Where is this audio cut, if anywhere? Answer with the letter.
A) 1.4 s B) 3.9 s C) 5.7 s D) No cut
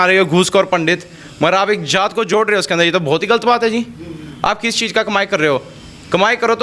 D